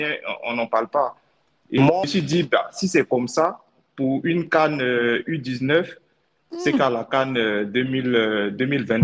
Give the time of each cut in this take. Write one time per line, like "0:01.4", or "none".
none